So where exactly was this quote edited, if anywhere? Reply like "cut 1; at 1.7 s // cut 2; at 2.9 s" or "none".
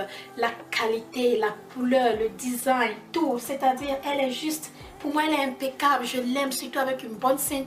cut 1; at 2.0 s